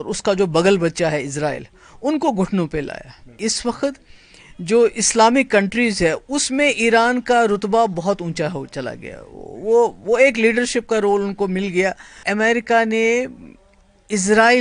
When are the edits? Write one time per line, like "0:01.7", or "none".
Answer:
0:03.3
0:12.2